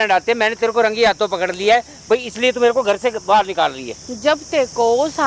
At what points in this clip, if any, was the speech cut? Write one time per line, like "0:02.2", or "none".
none